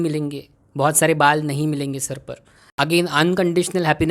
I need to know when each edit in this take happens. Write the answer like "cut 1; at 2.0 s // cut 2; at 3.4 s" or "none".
cut 1; at 2.6 s